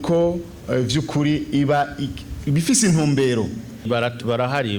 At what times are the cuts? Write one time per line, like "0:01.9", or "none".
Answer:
0:03.9

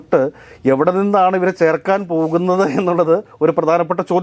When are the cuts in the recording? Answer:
none

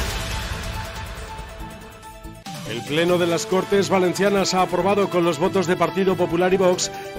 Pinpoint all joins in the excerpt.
0:02.4

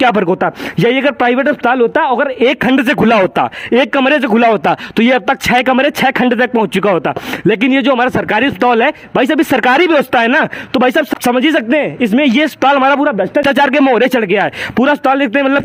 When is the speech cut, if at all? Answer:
none

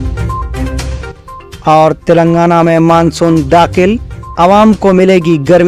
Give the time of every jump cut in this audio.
0:01.0

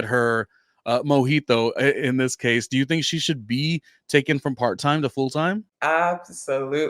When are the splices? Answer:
0:05.7

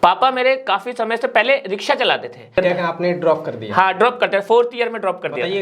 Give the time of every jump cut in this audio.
0:02.6

